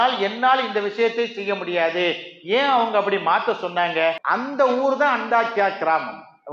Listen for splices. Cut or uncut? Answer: cut